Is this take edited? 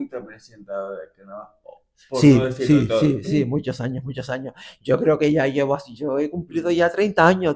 no; 0 cuts

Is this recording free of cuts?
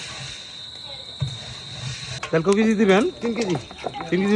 no; 1 cut; at 2.2 s

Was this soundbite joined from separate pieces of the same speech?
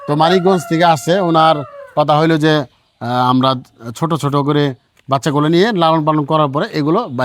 no; 0 cuts

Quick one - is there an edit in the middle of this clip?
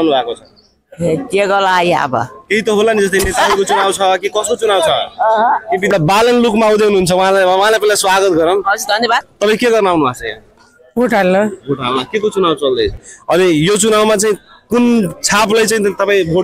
yes; 3 cuts; at 5.9 s, 9.3 s, 13.1 s

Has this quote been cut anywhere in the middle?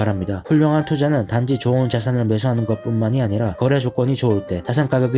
no; 0 cuts

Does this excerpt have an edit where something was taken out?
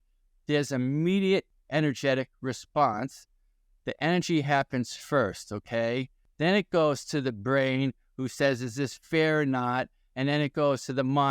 yes; 2 cuts; at 1.5 s, 6.2 s

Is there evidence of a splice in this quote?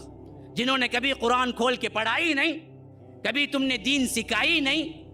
no; 0 cuts

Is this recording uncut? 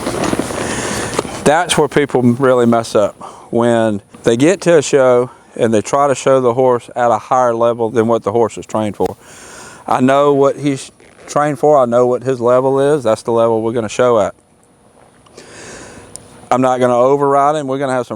no; 1 cut; at 4.1 s

